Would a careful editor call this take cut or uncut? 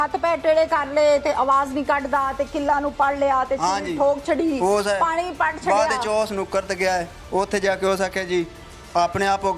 uncut